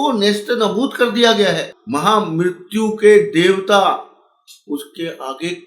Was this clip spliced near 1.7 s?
yes; 1 cut; at 1.7 s

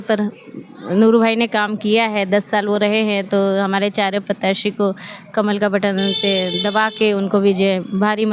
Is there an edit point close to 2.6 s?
no; 0 cuts

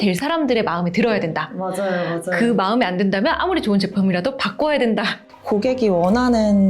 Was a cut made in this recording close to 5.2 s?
yes; 1 cut; at 5.2 s

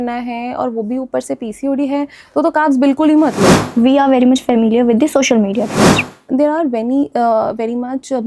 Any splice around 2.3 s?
no; 2 cuts; at 3.7 s, 6.0 s

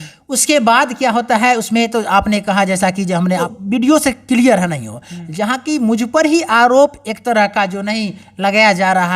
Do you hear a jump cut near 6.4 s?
no; 1 cut; at 3.5 s

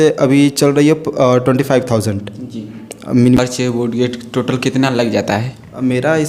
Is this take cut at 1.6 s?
no; 1 cut; at 3.4 s

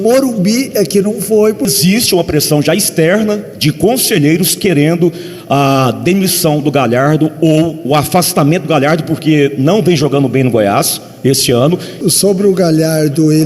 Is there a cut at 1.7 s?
yes; 2 cuts; at 1.7 s, 12.0 s

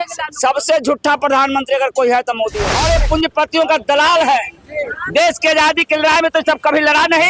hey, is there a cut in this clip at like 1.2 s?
no; 1 cut; at 2.6 s

